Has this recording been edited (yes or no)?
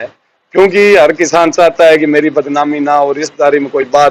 no